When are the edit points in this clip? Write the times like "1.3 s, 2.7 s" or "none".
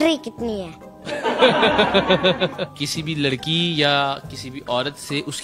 2.8 s